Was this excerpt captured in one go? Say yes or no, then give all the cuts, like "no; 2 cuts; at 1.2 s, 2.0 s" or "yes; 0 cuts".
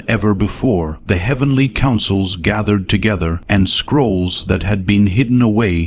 no; 2 cuts; at 0.9 s, 3.4 s